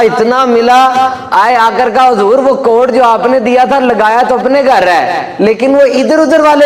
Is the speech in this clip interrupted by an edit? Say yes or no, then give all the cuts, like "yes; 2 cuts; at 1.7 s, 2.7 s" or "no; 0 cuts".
no; 0 cuts